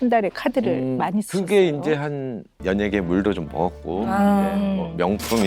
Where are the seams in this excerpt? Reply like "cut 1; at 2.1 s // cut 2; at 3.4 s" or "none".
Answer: cut 1; at 2.5 s

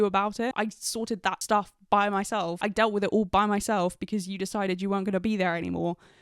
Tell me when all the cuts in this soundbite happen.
cut 1; at 1.0 s // cut 2; at 2.6 s

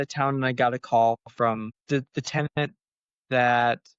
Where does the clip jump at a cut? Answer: cut 1; at 1.8 s

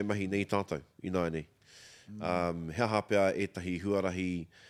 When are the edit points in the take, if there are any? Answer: none

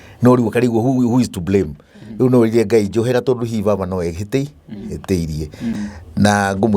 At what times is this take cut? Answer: cut 1; at 5.8 s

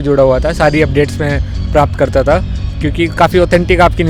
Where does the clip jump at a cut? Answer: none

